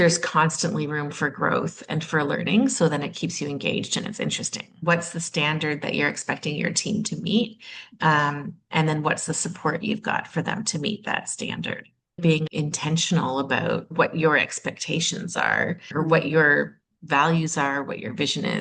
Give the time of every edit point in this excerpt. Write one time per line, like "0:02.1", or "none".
0:04.7
0:12.4
0:13.9
0:15.9